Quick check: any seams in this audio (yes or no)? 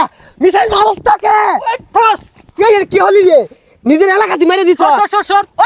no